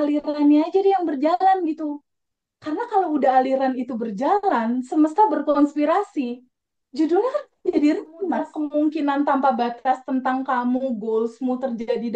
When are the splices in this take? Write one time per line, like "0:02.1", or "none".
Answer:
0:08.6